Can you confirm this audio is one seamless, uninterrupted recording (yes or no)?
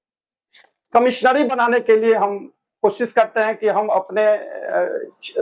yes